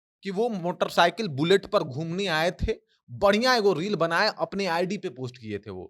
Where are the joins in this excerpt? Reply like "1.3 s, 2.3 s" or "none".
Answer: none